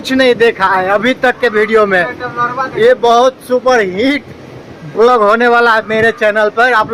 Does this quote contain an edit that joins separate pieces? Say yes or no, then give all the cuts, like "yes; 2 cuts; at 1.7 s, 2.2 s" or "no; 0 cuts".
no; 0 cuts